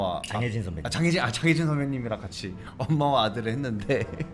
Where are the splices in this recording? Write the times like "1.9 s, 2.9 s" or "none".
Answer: none